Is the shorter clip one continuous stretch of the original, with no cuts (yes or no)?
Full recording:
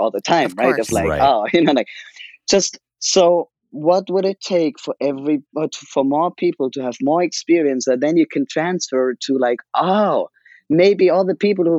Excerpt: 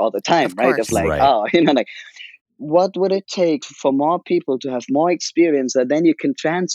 no